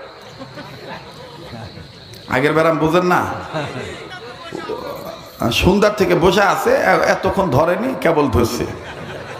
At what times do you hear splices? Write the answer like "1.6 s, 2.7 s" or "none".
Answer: none